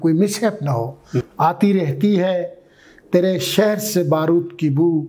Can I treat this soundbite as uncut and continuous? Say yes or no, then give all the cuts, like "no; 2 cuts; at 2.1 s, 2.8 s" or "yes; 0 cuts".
no; 1 cut; at 1.3 s